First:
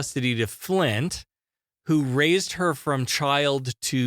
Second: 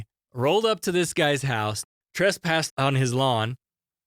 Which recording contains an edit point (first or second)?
second